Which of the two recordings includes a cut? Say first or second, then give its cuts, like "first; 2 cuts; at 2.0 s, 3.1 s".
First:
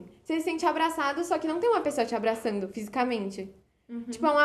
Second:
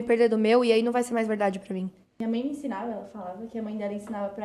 second; 1 cut; at 2.2 s